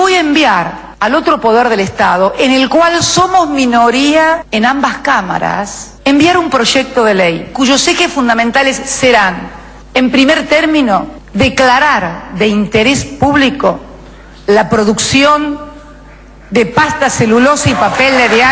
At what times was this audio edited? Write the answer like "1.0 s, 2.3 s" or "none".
none